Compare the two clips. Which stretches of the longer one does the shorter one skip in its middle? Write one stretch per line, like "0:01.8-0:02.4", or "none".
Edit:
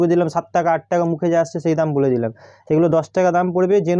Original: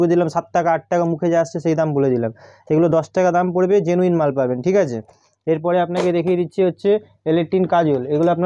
none